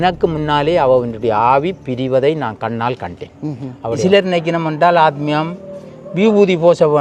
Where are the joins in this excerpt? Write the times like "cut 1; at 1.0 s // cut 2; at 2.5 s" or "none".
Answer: cut 1; at 4.0 s